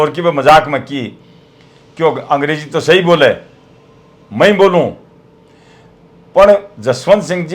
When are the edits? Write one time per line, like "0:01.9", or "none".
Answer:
none